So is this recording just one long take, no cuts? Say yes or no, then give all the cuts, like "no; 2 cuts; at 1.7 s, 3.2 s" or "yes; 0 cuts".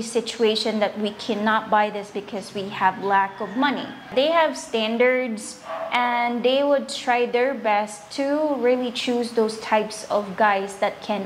no; 1 cut; at 4.1 s